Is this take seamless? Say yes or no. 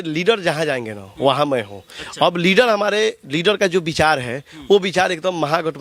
yes